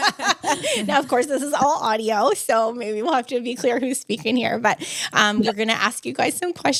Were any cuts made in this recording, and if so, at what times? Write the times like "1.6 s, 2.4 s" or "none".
none